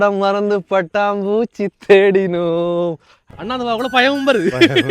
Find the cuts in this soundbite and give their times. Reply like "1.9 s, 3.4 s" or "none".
3.2 s